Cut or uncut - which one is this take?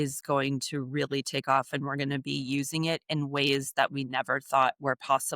uncut